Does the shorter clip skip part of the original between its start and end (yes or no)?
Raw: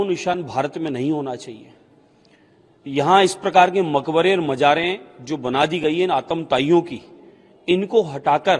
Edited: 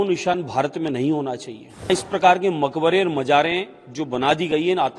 yes